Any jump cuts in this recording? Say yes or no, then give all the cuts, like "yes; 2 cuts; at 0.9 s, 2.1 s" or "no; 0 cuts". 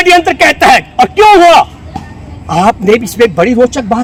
no; 0 cuts